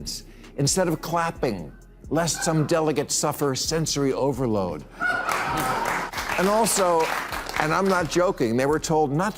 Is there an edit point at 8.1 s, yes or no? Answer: no